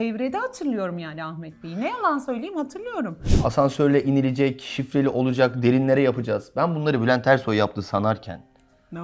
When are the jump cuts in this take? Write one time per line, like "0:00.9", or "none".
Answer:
0:03.2